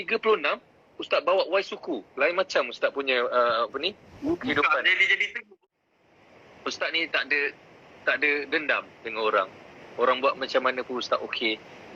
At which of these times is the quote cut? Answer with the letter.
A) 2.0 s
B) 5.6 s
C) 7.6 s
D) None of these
B